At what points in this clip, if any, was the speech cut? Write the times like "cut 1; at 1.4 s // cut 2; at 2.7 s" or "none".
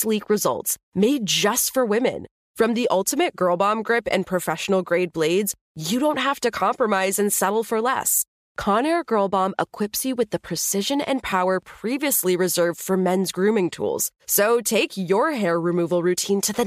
none

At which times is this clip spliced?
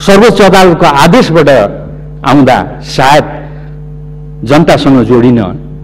none

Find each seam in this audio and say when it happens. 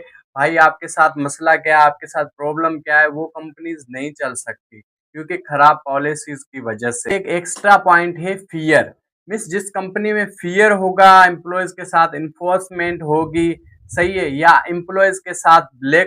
cut 1; at 7.0 s

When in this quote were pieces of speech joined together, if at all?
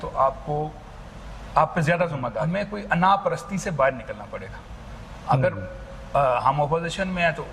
cut 1; at 2.5 s

